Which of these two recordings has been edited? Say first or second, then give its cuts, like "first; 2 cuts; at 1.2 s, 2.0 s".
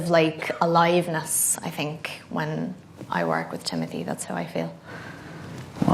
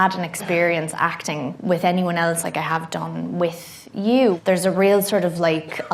second; 1 cut; at 4.4 s